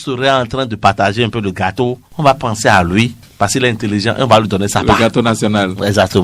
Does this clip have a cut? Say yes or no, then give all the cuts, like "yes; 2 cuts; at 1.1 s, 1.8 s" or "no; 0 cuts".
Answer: no; 0 cuts